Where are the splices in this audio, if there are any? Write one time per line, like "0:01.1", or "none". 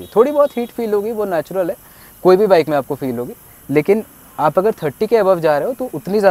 none